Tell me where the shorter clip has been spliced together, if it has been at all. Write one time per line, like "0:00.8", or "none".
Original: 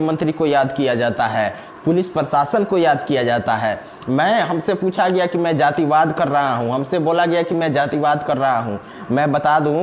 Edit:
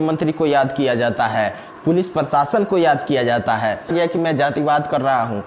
0:03.9